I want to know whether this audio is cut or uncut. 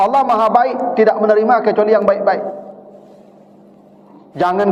uncut